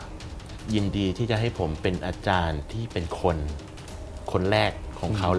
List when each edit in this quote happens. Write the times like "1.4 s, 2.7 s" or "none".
none